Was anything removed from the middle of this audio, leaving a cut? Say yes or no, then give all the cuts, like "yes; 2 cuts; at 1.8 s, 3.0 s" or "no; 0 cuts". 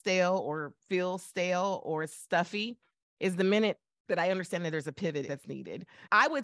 yes; 1 cut; at 5.3 s